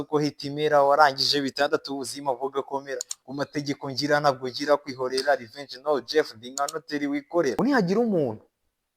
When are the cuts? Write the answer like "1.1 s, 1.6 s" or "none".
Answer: 7.6 s